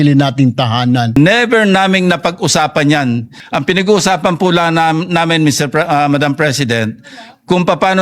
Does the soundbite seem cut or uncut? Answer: cut